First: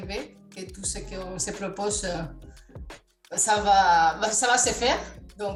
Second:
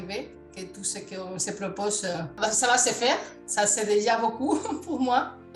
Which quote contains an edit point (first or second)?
second